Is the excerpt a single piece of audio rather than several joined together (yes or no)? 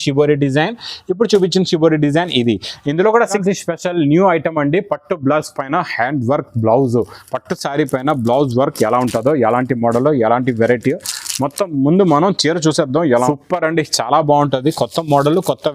no